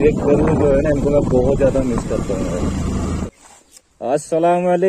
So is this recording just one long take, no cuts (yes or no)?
no